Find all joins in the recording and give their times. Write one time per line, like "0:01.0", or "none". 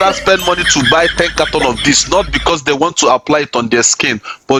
none